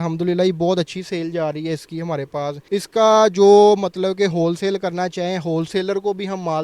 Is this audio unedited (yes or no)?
yes